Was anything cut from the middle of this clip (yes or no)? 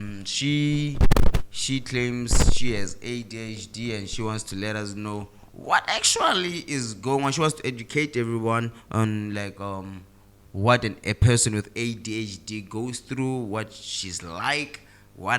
no